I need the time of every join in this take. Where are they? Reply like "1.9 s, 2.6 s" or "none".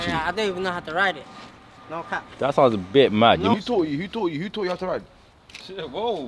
3.5 s